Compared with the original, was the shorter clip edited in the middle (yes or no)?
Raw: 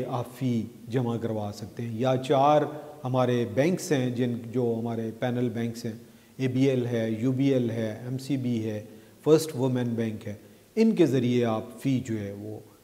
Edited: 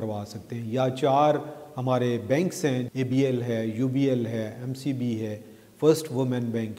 yes